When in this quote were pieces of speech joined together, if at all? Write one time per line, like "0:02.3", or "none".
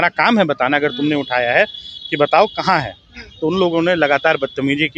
none